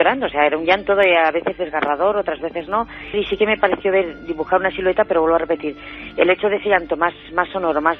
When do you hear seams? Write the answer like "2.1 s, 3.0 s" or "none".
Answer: 3.0 s

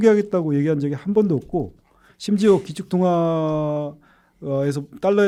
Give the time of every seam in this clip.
none

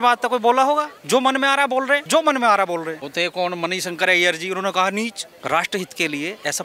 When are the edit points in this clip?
1.0 s, 2.0 s, 3.0 s, 5.3 s

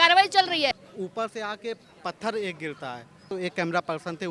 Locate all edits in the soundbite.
0.7 s, 3.3 s

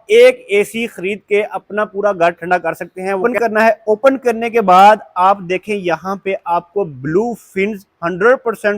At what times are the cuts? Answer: 3.2 s

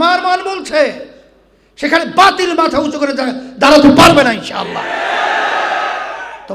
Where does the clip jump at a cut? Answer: none

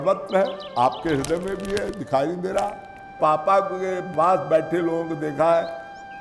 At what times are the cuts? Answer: 3.1 s

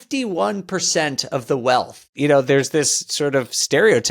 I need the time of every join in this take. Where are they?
2.1 s

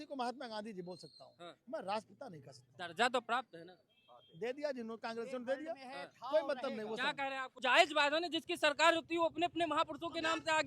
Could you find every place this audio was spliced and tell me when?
7.5 s

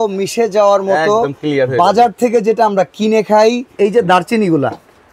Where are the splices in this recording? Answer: 3.7 s

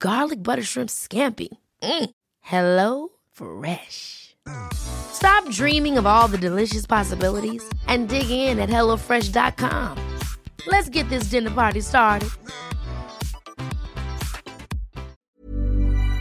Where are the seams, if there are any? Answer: 15.2 s

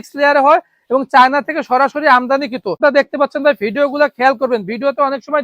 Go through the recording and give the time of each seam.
2.8 s

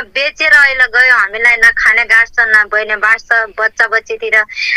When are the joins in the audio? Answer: none

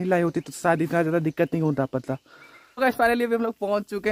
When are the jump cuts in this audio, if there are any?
2.7 s

